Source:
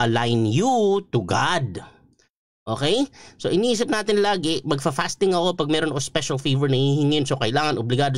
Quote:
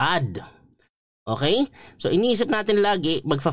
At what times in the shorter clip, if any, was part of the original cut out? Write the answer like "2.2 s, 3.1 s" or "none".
none